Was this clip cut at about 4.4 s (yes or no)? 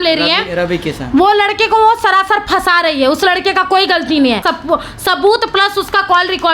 yes